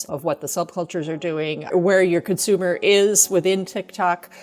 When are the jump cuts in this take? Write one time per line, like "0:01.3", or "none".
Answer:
0:01.6